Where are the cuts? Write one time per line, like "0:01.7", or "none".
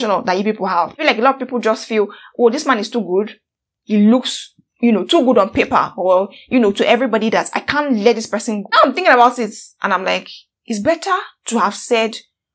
0:01.0
0:08.7